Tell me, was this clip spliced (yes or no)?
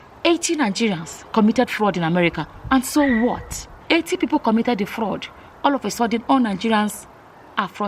yes